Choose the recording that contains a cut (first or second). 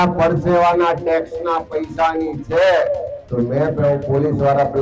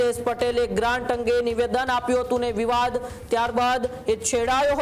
first